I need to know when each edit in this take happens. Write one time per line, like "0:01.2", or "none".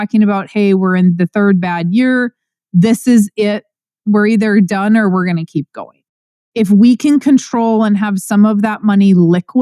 0:06.4